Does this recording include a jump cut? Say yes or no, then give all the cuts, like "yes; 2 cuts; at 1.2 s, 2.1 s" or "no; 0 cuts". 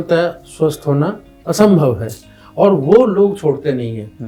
no; 0 cuts